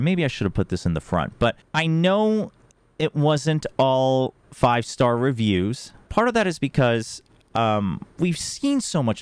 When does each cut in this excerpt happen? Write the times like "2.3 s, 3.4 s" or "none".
1.6 s, 6.1 s